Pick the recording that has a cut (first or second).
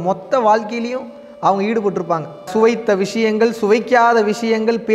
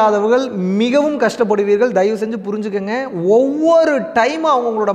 first